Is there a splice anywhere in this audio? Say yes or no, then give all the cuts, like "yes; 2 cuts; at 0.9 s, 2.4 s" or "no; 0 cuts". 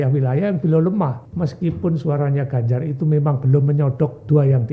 yes; 1 cut; at 1.2 s